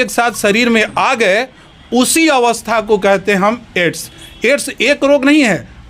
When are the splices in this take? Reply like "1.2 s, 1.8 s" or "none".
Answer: none